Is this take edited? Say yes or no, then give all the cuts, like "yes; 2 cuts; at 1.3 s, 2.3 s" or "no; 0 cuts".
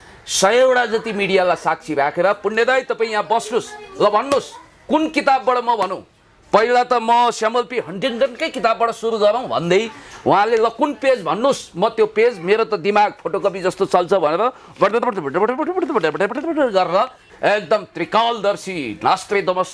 yes; 1 cut; at 17.2 s